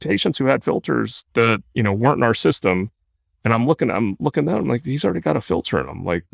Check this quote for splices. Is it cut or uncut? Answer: uncut